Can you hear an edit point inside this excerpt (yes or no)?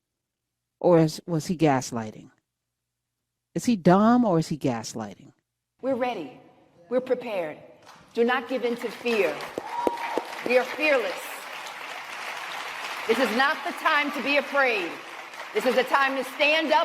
yes